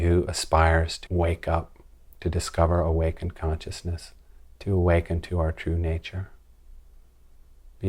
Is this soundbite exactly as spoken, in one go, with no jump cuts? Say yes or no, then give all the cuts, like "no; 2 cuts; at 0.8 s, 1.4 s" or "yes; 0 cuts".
no; 1 cut; at 1.0 s